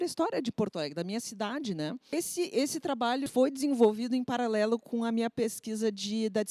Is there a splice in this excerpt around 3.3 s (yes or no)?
yes